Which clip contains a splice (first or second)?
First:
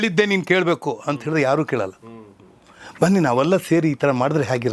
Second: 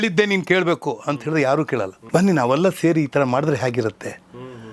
second